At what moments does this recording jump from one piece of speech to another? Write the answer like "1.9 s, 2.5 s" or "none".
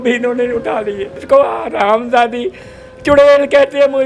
1.2 s